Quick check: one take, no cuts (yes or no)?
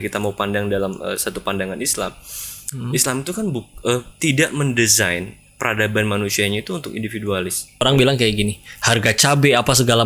no